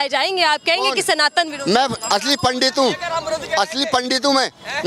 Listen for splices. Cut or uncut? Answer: uncut